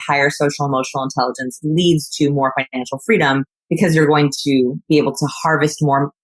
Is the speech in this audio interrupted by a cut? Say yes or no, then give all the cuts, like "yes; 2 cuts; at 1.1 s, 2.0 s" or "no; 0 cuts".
yes; 2 cuts; at 3.6 s, 4.8 s